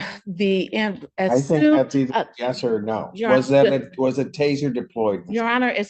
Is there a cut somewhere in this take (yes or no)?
no